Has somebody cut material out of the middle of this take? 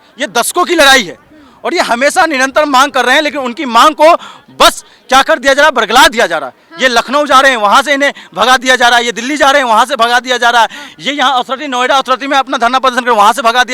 no; 0 cuts

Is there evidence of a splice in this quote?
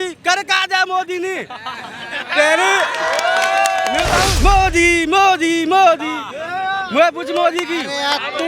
yes; 1 cut; at 4.3 s

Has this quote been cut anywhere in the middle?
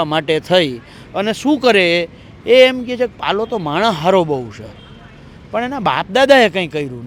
no; 0 cuts

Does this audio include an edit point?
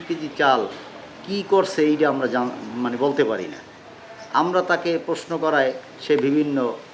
no; 0 cuts

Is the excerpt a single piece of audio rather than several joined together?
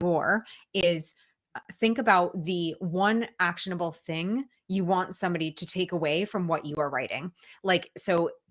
yes; 0 cuts

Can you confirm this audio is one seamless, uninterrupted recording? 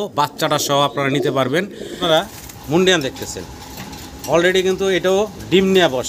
no; 1 cut; at 2.0 s

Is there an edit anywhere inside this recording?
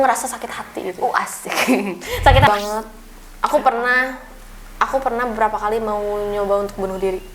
yes; 1 cut; at 2.5 s

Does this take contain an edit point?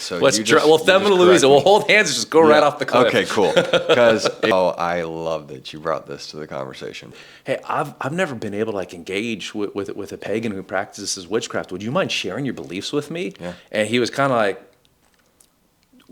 yes; 2 cuts; at 4.5 s, 7.2 s

